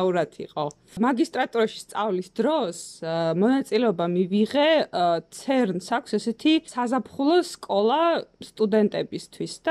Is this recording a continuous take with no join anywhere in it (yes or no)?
no